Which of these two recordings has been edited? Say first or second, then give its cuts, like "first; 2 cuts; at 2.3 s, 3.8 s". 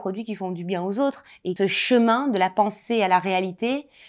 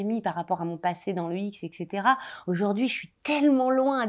first; 1 cut; at 1.6 s